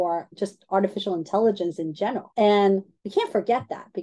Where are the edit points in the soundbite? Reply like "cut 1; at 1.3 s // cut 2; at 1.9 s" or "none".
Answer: cut 1; at 2.2 s // cut 2; at 3.0 s